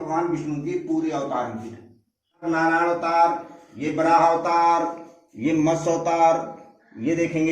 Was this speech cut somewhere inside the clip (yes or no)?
yes